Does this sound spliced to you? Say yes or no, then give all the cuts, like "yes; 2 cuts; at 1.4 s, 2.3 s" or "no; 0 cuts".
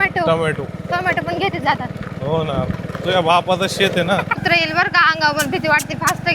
yes; 1 cut; at 4.4 s